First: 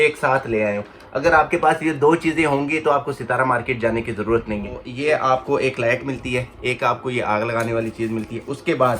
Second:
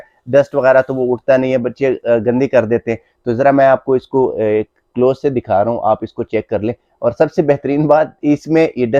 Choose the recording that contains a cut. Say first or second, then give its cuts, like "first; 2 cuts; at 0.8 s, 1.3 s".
first; 1 cut; at 4.9 s